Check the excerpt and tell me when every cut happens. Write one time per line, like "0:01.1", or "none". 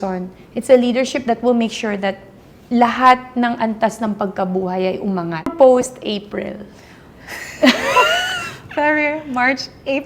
0:05.4